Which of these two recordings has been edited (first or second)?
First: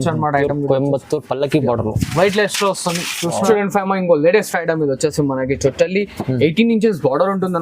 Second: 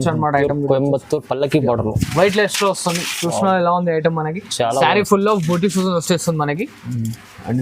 first